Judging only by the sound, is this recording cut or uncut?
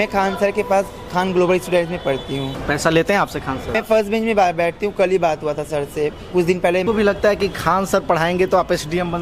cut